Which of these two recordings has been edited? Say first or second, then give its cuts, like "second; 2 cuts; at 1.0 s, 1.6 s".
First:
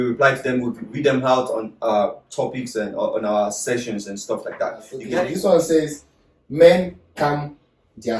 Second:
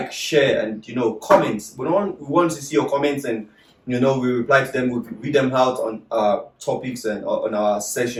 first; 1 cut; at 5.0 s